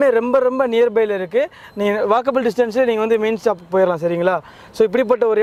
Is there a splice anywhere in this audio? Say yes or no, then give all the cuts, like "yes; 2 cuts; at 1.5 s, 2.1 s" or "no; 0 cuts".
no; 0 cuts